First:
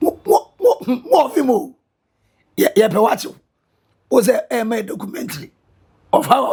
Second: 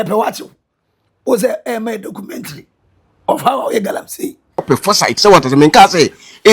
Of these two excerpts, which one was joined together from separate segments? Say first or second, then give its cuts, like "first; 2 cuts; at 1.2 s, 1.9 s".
second; 1 cut; at 4.6 s